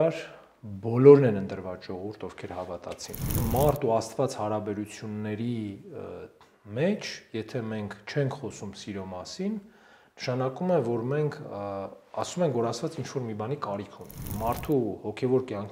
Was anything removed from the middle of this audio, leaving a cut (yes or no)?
yes